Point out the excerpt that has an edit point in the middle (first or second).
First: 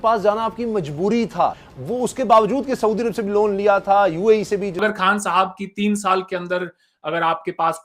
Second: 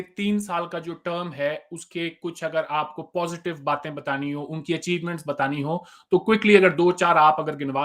first